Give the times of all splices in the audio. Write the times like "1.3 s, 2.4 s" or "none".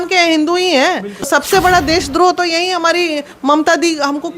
1.3 s